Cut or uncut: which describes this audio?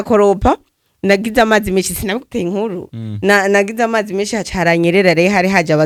uncut